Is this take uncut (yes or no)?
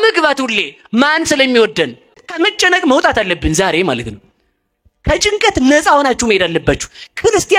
no